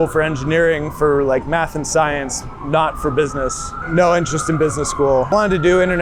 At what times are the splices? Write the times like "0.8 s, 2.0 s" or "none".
3.7 s, 5.3 s